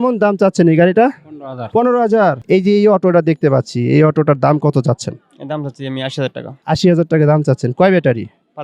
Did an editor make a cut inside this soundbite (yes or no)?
yes